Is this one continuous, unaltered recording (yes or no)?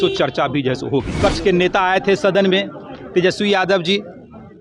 no